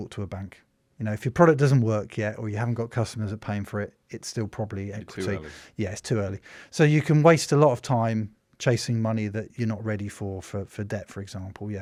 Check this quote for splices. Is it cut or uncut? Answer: uncut